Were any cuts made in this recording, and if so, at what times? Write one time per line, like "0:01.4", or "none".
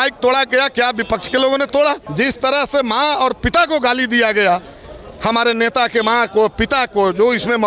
0:02.0